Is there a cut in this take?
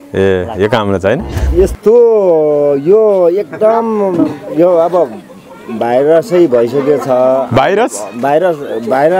yes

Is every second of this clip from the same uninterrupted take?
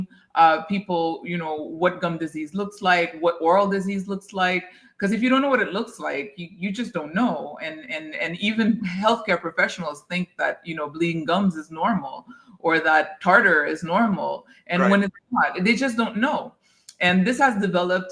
yes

